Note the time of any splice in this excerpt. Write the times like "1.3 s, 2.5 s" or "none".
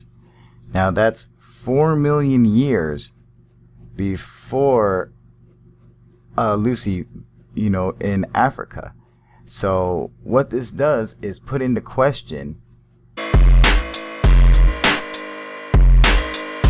none